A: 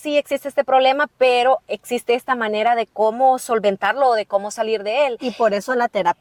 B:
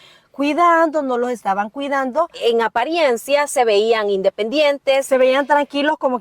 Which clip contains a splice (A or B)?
B